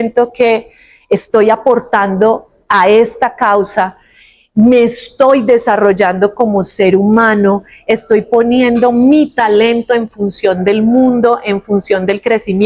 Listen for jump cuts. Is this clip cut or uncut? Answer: uncut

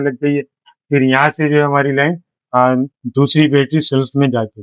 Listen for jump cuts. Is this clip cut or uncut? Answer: uncut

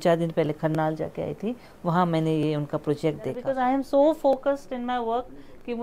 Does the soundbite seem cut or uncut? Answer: cut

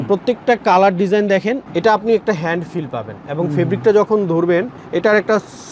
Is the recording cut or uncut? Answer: cut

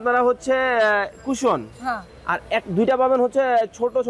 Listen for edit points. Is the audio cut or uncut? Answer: uncut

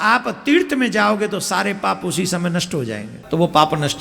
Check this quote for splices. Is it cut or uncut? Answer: cut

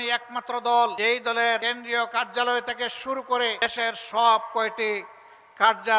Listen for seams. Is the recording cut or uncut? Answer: cut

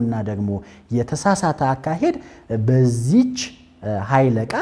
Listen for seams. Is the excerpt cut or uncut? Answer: uncut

